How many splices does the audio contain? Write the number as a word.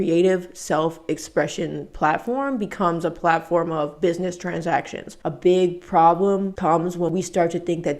two